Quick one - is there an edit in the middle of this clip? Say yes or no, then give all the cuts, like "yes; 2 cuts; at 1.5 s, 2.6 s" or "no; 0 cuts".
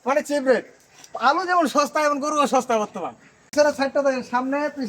yes; 1 cut; at 3.5 s